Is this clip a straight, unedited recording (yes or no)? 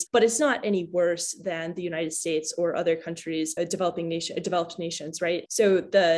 yes